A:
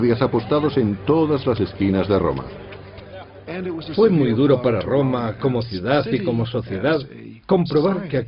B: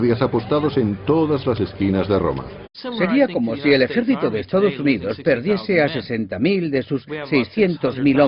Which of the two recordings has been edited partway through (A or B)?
A